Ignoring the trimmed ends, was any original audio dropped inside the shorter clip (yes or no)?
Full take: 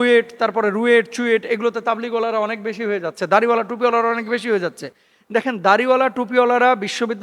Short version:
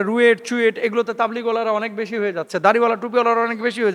no